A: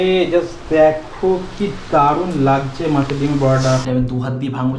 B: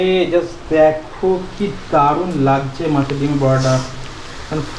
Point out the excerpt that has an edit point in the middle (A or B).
A